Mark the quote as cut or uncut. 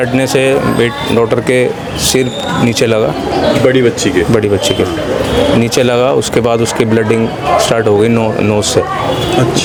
uncut